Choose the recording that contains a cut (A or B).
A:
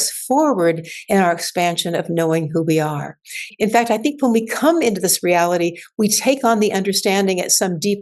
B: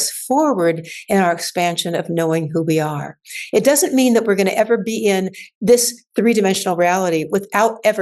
A